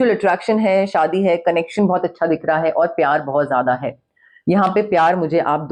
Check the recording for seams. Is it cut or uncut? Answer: uncut